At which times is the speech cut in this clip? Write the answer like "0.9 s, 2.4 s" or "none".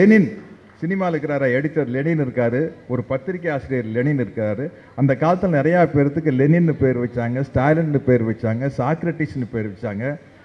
none